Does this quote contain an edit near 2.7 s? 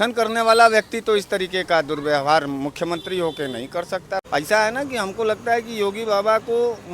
no; 1 cut; at 4.2 s

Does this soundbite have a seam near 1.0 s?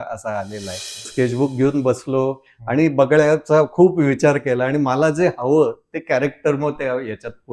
yes; 1 cut; at 1.0 s

